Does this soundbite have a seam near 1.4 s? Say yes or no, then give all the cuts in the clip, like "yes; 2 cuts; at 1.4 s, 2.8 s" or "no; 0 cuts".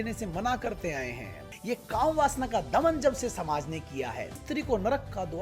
yes; 2 cuts; at 1.4 s, 4.4 s